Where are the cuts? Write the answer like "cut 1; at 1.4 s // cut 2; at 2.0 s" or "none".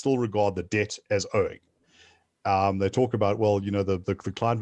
none